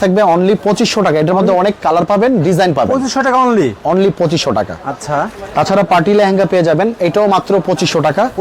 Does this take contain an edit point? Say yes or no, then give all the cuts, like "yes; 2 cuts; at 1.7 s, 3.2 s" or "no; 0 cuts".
no; 0 cuts